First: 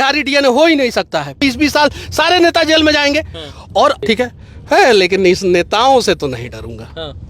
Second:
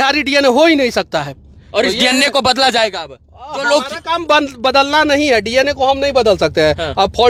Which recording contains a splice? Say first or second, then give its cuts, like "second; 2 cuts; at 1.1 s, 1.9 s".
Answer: first; 2 cuts; at 1.4 s, 4.0 s